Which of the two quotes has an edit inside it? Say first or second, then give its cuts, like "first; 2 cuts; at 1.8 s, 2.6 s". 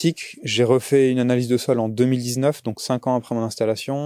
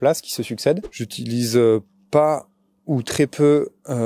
second; 1 cut; at 1.1 s